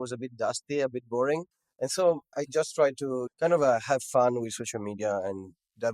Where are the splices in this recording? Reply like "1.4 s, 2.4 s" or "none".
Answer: 1.6 s, 3.2 s